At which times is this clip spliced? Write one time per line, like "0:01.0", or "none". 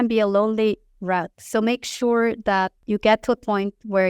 0:02.8